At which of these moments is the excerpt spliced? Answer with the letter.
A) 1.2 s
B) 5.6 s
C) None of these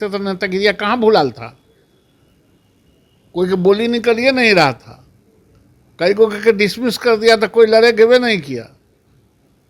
C